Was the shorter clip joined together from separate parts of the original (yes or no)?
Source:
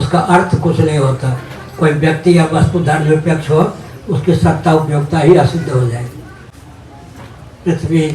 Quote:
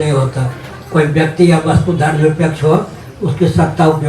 no